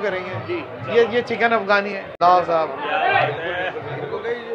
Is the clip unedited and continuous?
no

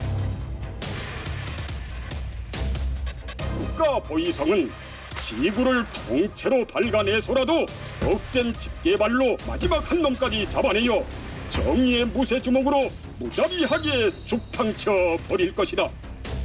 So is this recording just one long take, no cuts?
yes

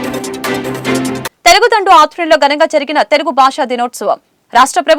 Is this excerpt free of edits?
no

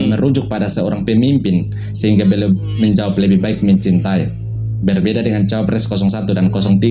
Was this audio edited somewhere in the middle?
no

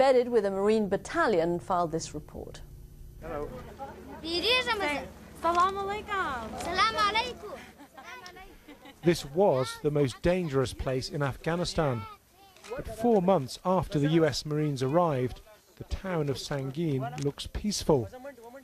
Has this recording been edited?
no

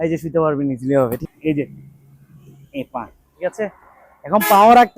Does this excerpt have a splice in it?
yes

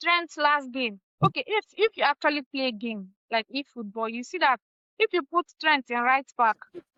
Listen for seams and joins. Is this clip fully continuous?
yes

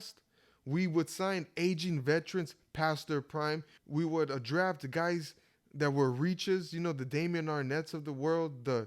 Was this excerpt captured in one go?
no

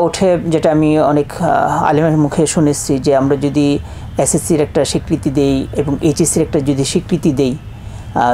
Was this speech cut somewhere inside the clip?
no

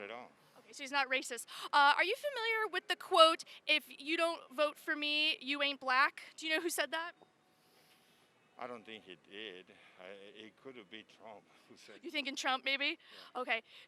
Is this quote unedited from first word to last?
yes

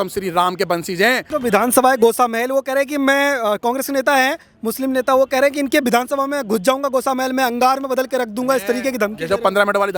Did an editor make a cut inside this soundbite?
no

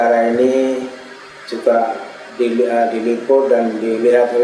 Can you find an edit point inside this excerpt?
no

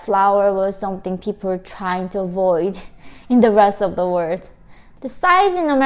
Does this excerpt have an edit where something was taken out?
yes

